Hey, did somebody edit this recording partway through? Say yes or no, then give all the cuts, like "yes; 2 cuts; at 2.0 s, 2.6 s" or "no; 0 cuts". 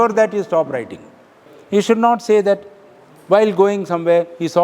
yes; 1 cut; at 1.5 s